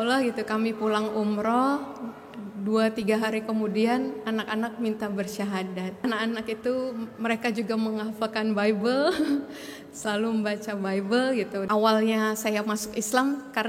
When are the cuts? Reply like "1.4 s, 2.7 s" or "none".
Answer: 6.0 s, 11.6 s